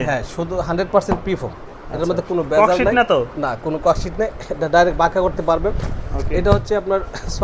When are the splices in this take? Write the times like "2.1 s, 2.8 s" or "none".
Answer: none